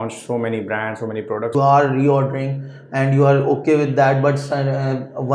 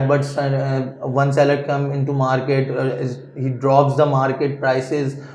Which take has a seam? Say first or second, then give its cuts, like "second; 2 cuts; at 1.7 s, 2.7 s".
first; 1 cut; at 1.5 s